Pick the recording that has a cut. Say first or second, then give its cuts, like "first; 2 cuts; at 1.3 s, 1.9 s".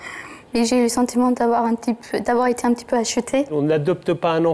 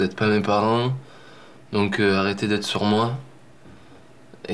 first; 1 cut; at 3.5 s